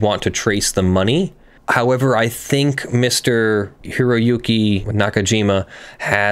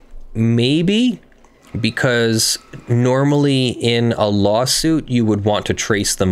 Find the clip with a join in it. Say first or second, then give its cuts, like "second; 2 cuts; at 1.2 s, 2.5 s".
first; 2 cuts; at 3.8 s, 4.9 s